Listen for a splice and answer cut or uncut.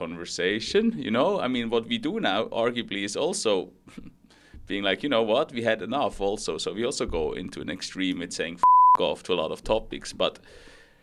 uncut